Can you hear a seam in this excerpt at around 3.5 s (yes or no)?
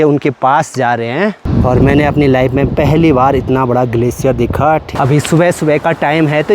no